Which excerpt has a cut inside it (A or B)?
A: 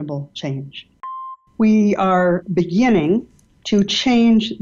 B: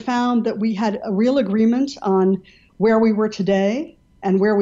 A